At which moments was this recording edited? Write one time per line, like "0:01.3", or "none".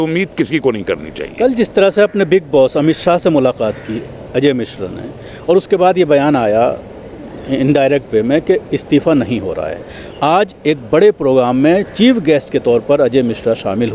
none